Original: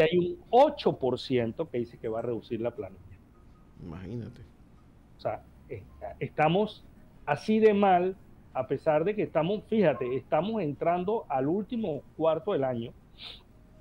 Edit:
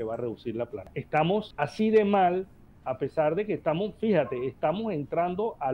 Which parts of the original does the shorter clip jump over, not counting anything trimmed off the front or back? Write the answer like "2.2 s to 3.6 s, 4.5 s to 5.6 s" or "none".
2.9 s to 6.1 s, 6.7 s to 7.2 s